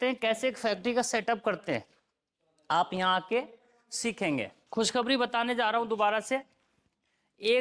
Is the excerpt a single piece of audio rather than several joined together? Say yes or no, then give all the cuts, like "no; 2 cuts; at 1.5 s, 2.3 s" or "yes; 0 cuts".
no; 1 cut; at 4.6 s